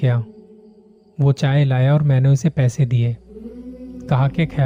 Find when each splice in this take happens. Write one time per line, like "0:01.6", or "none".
none